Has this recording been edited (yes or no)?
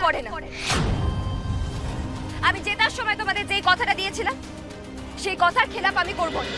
no